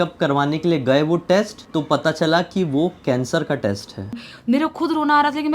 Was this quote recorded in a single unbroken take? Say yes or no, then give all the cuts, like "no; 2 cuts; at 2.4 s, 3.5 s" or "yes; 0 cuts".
no; 2 cuts; at 1.6 s, 4.2 s